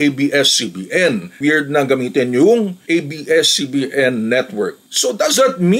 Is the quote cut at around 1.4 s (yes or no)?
yes